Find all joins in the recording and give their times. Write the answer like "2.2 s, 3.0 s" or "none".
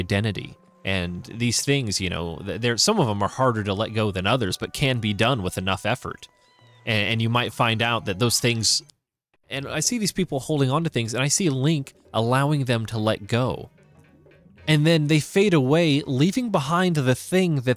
9.0 s